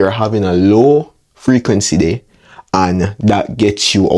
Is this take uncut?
yes; 0 cuts

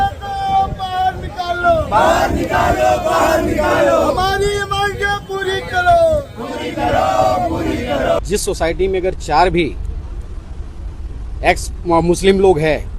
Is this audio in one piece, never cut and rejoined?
no; 1 cut; at 8.2 s

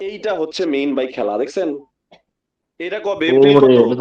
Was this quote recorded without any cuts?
yes; 0 cuts

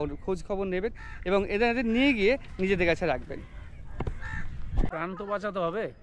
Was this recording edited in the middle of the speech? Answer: yes; 1 cut; at 4.9 s

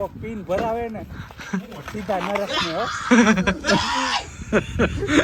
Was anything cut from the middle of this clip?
no; 0 cuts

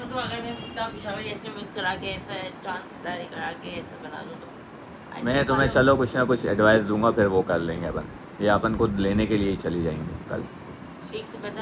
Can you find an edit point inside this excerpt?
no; 0 cuts

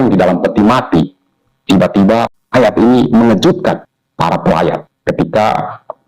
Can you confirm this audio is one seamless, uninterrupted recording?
no; 3 cuts; at 2.4 s, 4.0 s, 4.9 s

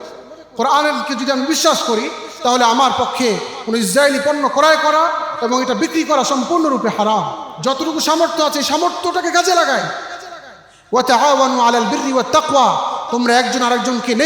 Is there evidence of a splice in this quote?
yes; 1 cut; at 7.4 s

